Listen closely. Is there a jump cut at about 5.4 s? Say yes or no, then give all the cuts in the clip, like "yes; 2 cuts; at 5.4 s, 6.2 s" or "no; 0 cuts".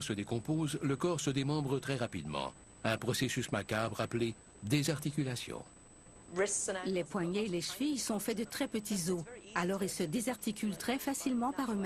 no; 1 cut; at 1.4 s